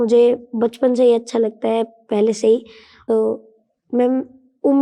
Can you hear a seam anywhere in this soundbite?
yes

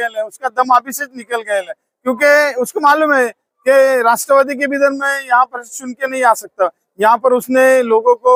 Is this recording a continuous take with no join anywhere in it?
yes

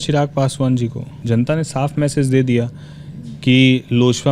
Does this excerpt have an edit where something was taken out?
yes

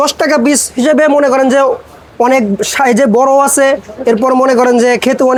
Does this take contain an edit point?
no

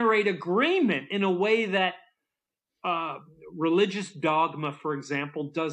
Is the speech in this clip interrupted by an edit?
no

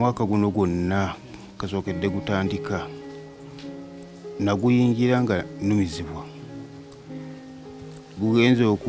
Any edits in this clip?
yes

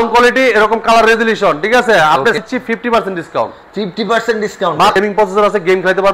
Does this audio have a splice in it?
yes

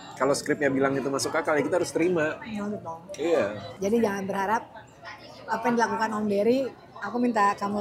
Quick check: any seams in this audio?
no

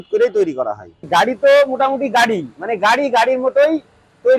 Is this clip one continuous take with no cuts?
no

